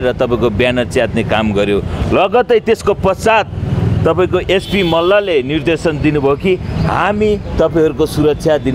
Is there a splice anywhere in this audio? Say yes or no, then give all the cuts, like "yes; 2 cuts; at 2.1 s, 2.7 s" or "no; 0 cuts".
no; 0 cuts